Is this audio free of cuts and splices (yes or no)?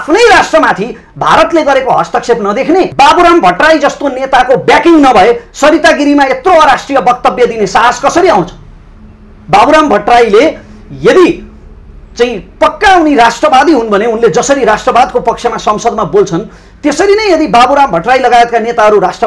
no